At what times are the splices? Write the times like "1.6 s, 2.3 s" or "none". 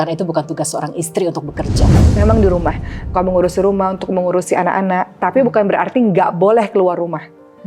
1.9 s